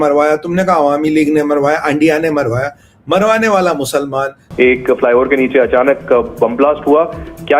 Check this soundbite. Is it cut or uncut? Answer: cut